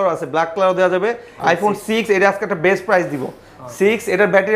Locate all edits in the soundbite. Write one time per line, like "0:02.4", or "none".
0:01.3